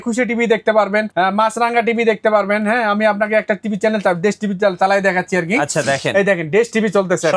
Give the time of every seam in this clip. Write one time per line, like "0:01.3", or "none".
0:01.1